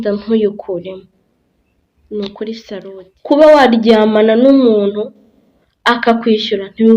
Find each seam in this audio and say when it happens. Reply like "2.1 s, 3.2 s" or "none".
2.9 s